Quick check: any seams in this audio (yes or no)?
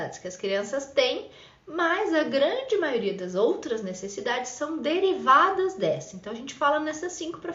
no